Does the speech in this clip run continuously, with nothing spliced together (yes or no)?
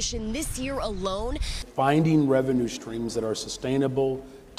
yes